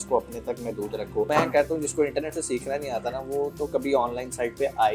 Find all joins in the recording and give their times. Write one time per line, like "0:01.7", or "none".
0:01.3

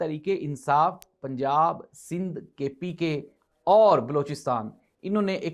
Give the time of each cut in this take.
none

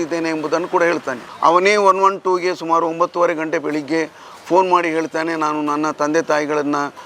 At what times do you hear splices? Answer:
0:01.3

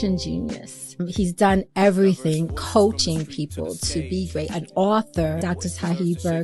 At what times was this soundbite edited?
0:01.1
0:05.4

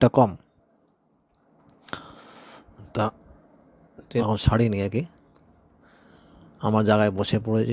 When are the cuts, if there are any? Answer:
0:04.2

